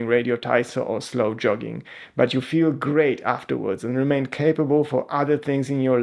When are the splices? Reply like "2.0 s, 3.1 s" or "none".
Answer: none

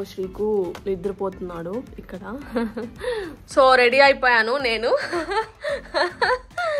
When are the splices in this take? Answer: 3.6 s

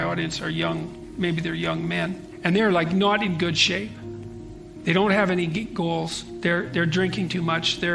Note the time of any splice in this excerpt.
2.3 s

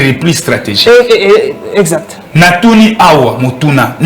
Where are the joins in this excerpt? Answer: 2.2 s

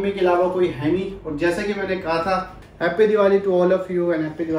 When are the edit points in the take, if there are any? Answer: 2.6 s

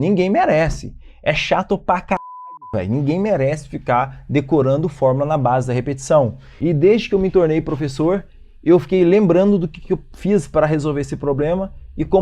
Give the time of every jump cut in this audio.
6.4 s

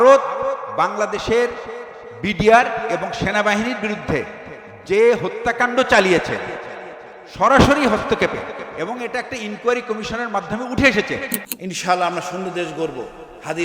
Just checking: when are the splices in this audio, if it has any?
11.4 s

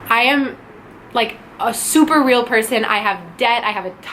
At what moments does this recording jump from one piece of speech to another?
none

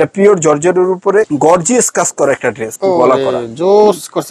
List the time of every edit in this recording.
1.3 s, 2.7 s

